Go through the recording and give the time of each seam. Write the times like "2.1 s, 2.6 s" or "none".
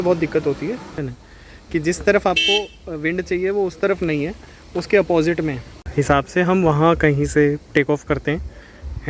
0.9 s, 5.8 s